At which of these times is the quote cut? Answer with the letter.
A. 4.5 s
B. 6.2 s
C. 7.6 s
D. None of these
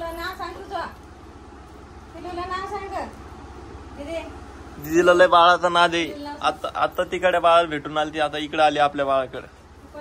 D